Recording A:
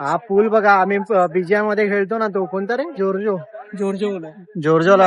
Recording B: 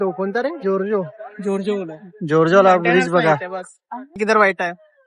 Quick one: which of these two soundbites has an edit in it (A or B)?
B